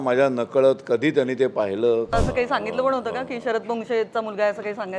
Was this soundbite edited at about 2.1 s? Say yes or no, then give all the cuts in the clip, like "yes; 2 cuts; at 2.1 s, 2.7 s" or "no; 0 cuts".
yes; 1 cut; at 2.1 s